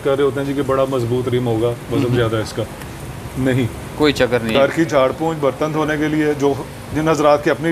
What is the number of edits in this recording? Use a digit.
1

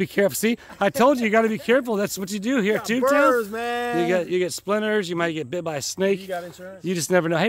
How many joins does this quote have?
0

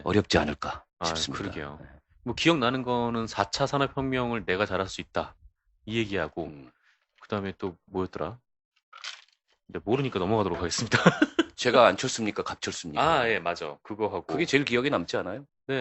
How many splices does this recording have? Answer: 0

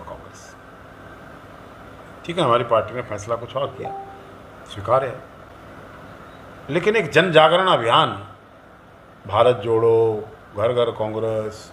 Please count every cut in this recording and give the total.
1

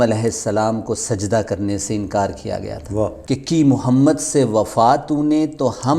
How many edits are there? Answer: 1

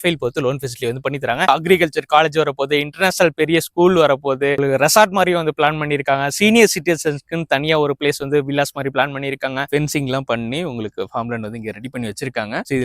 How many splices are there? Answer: 2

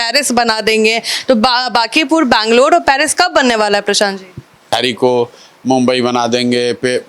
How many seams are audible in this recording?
1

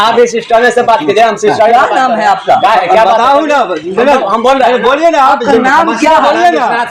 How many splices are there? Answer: 0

